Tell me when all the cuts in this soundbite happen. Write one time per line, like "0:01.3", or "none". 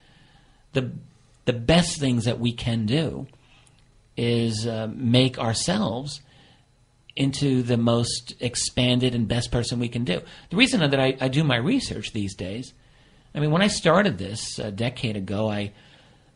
0:06.2